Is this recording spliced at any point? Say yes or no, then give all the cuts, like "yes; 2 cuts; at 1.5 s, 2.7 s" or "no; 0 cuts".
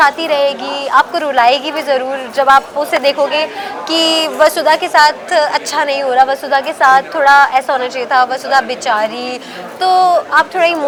no; 0 cuts